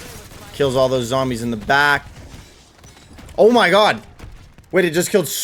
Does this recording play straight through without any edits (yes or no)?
yes